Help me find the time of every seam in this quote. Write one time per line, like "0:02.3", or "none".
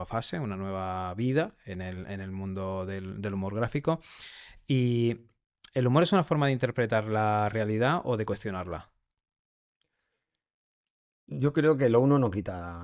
none